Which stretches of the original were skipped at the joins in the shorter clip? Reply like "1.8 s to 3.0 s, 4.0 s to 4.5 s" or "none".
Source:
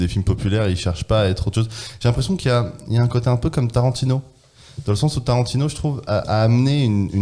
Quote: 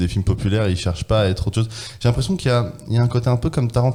none

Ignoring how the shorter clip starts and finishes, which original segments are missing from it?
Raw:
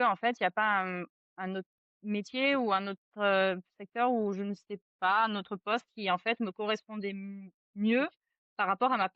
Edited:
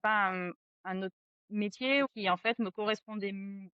2.6 s to 5.9 s

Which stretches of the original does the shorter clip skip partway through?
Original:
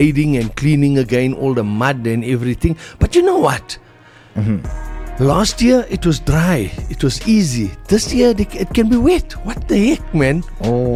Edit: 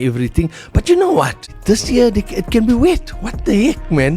3.8 s to 7.7 s

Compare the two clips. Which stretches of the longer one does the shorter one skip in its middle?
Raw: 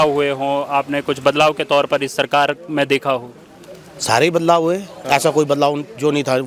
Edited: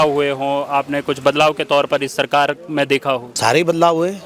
3.3 s to 4.0 s

